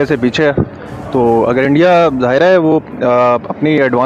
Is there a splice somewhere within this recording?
no; 0 cuts

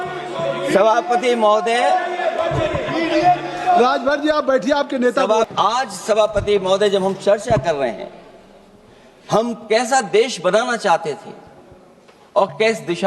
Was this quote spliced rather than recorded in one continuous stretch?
yes; 1 cut; at 5.5 s

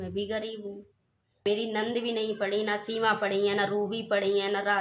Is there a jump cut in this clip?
yes; 1 cut; at 1.4 s

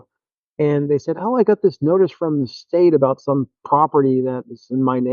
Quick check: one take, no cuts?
yes; 0 cuts

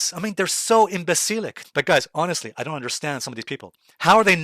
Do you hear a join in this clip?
yes; 1 cut; at 1.5 s

